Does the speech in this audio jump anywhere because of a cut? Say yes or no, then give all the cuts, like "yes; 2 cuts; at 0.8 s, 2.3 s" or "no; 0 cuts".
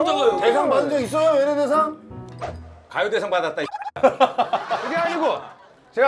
yes; 1 cut; at 4.9 s